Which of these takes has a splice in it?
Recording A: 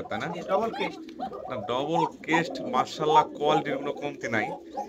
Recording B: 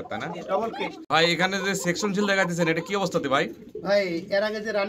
B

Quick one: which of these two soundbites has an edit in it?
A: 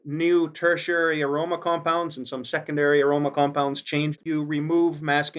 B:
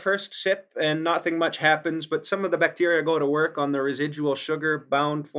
A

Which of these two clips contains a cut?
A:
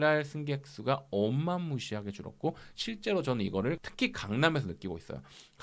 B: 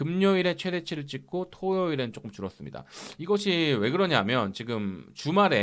A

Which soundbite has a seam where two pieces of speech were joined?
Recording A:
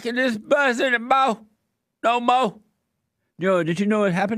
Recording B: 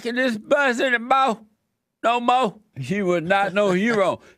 B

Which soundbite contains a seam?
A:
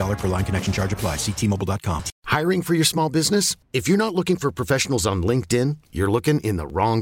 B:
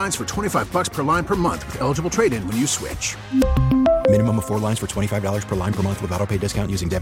A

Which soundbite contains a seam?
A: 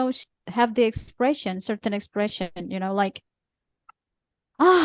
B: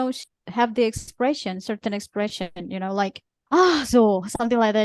B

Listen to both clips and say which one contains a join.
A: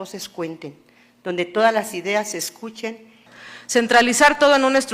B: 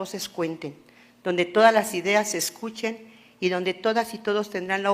A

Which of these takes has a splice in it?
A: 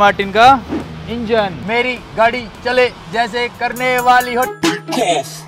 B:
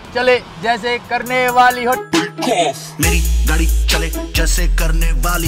A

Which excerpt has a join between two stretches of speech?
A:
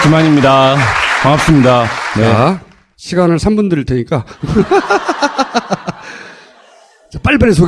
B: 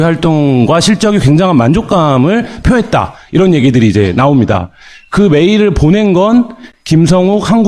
A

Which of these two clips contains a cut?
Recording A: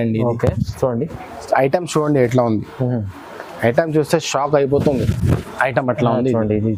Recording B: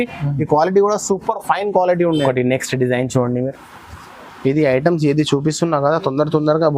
B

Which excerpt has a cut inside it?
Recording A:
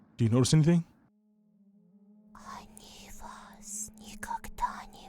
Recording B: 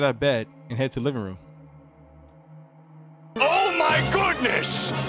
A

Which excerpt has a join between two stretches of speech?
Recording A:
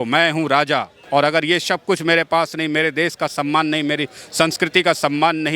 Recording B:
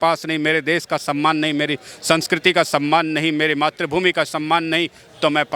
A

